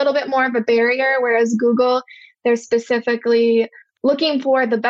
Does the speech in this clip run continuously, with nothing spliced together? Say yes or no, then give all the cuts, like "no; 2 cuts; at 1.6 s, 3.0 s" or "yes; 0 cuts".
no; 1 cut; at 3.8 s